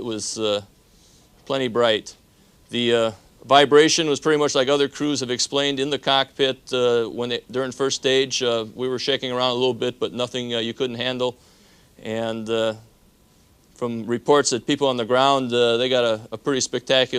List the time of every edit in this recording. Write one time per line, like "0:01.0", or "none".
0:04.8